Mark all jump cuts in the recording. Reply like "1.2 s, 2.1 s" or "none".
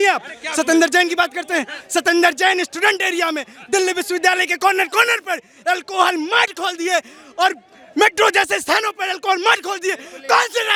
none